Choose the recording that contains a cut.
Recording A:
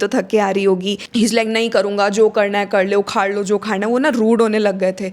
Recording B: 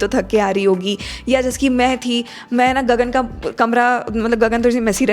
A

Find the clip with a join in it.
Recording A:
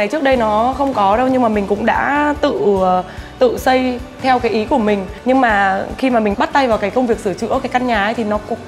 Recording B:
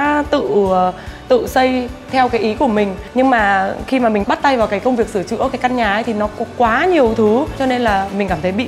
B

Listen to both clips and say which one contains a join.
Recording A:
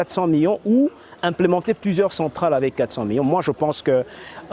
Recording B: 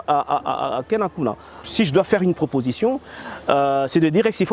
B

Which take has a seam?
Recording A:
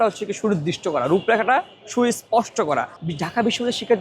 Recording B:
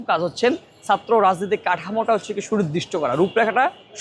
A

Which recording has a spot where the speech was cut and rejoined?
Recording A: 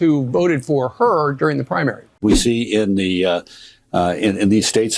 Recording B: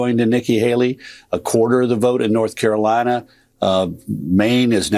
A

